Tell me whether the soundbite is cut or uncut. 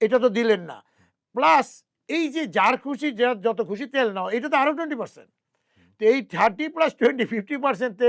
uncut